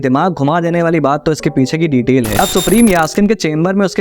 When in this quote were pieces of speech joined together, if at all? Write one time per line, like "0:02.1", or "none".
0:02.3